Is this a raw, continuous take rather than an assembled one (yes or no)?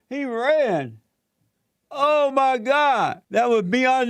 no